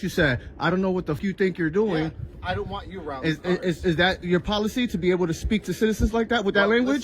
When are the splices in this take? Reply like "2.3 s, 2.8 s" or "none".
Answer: 1.2 s